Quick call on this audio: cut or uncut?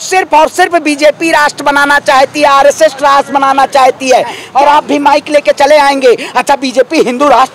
cut